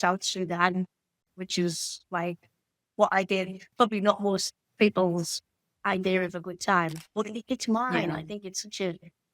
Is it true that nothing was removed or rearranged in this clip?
no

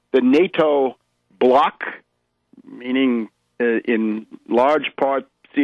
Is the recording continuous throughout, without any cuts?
yes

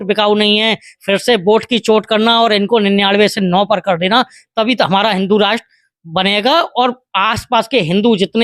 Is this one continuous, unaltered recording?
yes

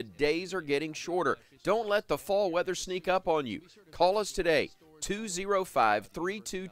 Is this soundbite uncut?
yes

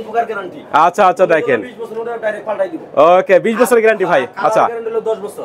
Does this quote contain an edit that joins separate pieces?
no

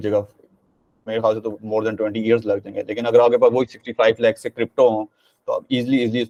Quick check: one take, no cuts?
yes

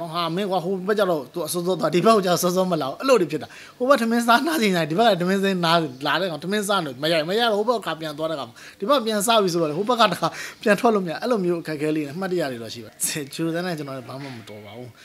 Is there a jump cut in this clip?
yes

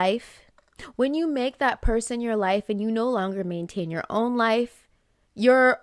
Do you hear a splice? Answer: no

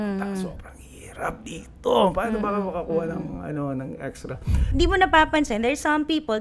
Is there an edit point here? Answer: yes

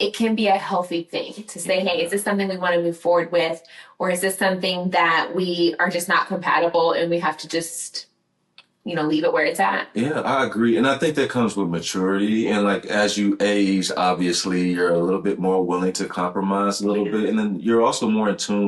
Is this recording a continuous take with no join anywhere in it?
yes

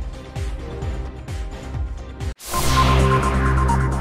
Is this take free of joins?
yes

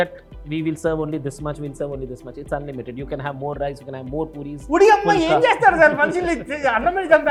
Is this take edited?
no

